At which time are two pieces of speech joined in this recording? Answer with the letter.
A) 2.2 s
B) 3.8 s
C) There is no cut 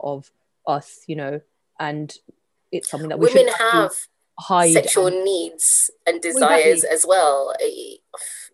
C